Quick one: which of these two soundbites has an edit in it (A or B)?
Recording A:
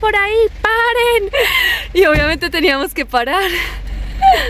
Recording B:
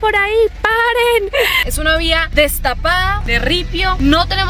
B